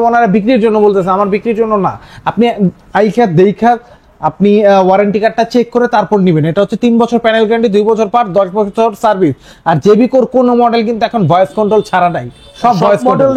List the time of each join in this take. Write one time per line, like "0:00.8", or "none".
none